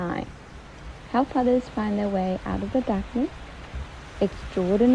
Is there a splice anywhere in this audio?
no; 0 cuts

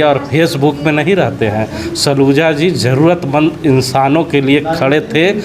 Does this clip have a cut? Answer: no; 0 cuts

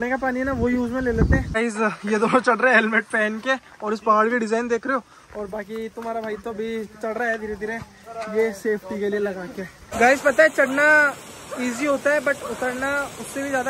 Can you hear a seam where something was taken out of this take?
yes; 2 cuts; at 1.6 s, 9.8 s

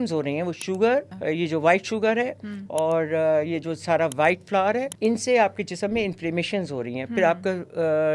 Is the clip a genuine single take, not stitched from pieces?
no; 2 cuts; at 1.1 s, 4.9 s

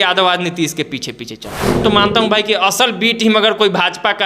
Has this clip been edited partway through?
yes; 1 cut; at 1.8 s

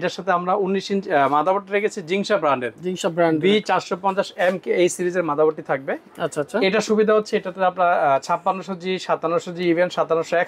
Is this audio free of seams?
yes; 0 cuts

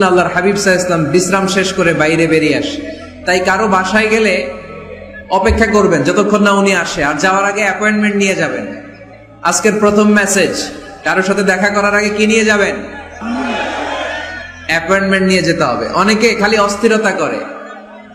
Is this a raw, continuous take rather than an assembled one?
yes; 0 cuts

